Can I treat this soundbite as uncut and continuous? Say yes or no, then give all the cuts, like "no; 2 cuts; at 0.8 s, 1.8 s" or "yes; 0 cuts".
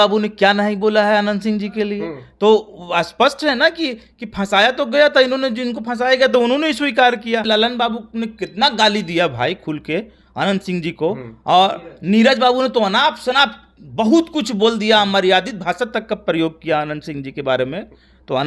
no; 1 cut; at 7.4 s